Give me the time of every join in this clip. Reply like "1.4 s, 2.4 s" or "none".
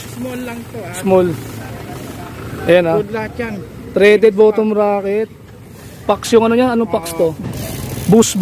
7.4 s